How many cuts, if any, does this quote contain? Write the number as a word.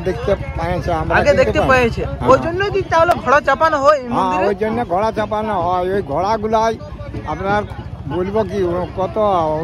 zero